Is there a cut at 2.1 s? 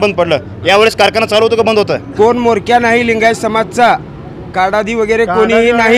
yes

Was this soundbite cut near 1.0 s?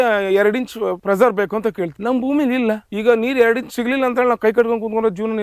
yes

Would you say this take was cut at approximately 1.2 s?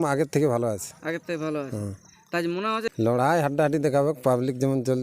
no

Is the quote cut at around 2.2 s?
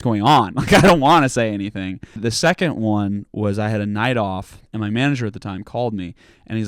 yes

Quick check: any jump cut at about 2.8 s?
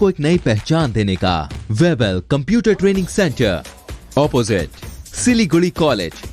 no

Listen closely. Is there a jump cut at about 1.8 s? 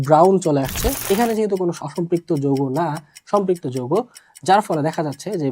yes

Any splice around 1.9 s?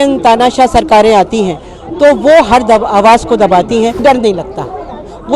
no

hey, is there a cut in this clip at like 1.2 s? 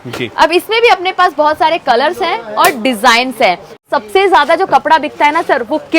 no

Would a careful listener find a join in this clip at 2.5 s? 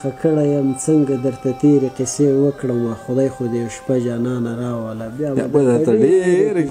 no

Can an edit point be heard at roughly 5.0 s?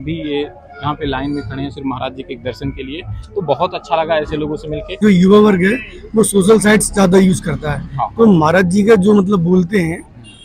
yes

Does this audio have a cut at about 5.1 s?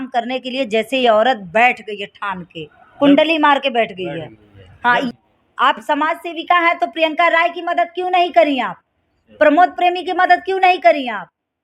yes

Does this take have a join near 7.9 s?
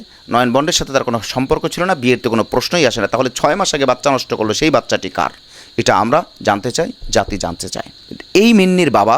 yes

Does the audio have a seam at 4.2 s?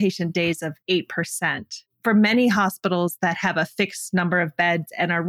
no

